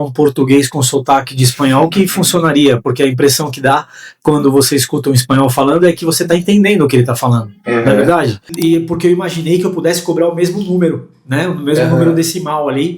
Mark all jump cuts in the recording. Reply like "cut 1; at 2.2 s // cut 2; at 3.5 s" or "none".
cut 1; at 8.5 s